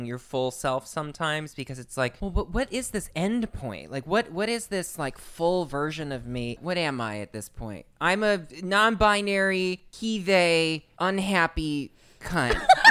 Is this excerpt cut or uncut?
cut